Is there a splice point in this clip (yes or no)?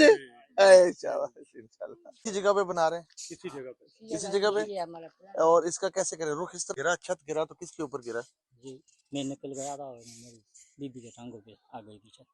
yes